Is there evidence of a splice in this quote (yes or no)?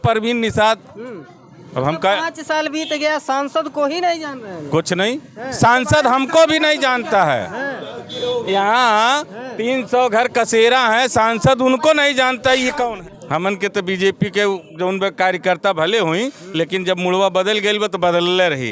yes